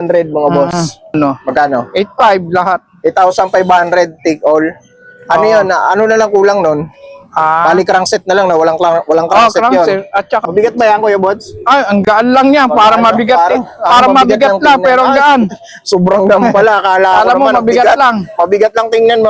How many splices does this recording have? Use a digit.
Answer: 2